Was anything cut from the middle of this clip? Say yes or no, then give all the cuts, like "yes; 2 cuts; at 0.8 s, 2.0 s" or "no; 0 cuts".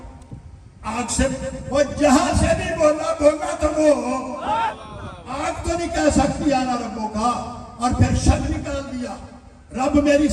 no; 0 cuts